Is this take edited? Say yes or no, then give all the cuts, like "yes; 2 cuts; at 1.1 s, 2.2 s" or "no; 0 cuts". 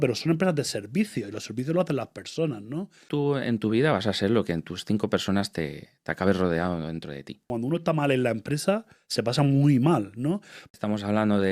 yes; 3 cuts; at 3.1 s, 7.5 s, 10.6 s